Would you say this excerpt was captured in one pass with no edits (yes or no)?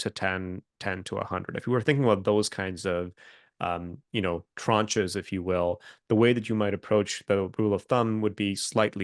yes